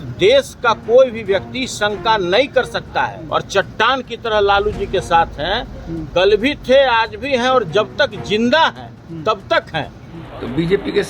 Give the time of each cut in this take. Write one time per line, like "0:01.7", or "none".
0:03.2
0:10.1